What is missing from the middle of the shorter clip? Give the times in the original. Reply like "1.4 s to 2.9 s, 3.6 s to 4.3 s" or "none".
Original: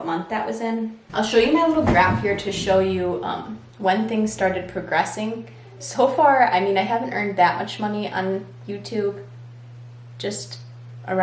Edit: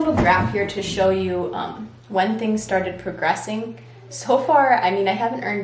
none